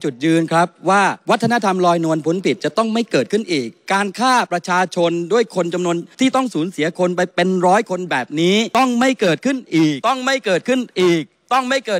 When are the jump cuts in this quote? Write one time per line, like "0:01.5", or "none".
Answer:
0:01.2
0:06.1
0:07.3
0:08.7
0:10.0

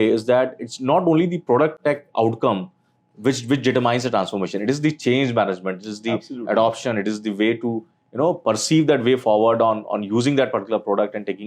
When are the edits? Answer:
none

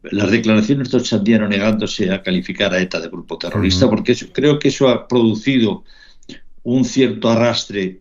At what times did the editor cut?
none

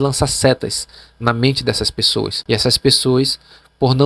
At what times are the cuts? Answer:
0:02.4

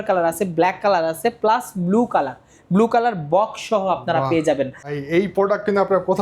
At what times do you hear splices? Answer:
0:05.0

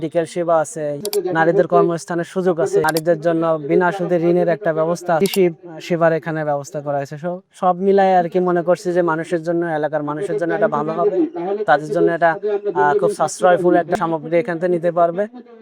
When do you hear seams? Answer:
0:01.0
0:02.8
0:05.2
0:13.9

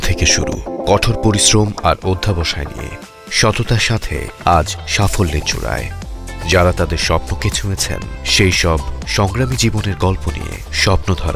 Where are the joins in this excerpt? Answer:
none

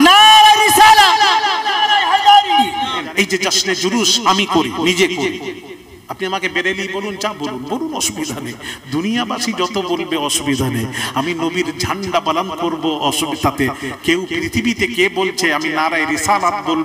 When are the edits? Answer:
0:03.0

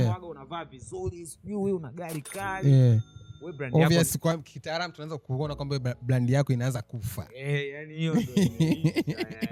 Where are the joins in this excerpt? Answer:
none

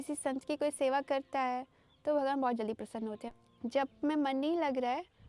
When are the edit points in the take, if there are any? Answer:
0:03.3

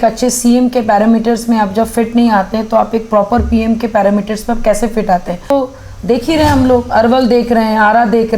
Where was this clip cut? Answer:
0:05.5

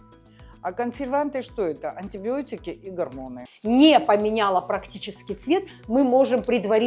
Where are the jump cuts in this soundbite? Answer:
0:03.5

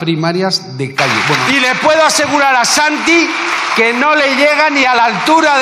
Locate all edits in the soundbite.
0:01.4

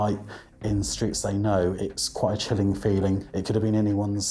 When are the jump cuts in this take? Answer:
0:01.8
0:03.3

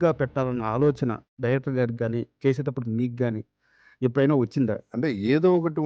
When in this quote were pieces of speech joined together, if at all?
0:04.8

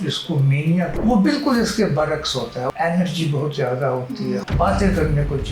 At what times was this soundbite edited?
0:00.9
0:02.7
0:04.4

